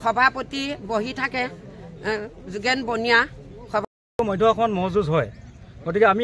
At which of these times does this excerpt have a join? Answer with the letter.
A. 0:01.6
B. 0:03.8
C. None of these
B